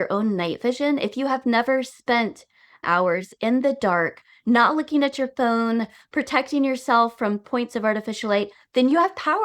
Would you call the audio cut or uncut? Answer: cut